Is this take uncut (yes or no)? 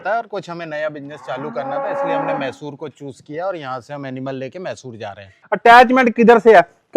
no